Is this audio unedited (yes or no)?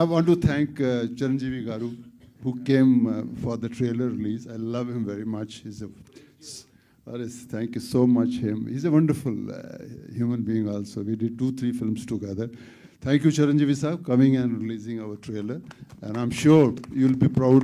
yes